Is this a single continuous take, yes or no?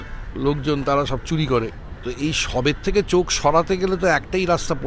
no